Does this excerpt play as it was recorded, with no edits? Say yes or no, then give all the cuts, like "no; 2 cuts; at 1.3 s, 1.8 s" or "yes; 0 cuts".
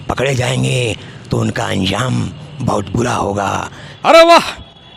no; 1 cut; at 3.8 s